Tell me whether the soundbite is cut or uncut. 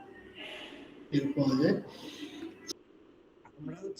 cut